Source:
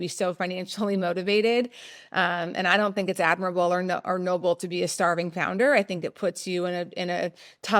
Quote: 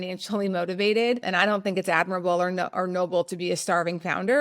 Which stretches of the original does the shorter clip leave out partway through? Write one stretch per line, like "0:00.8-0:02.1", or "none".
0:01.7-0:02.6